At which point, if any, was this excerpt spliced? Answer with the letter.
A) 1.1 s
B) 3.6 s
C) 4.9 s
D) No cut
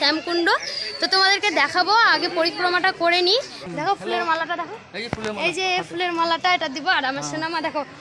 B